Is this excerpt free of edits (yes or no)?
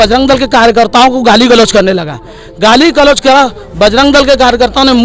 yes